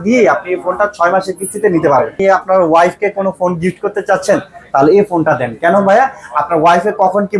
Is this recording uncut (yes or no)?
no